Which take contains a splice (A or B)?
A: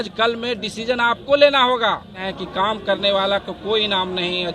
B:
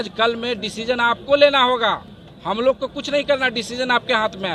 A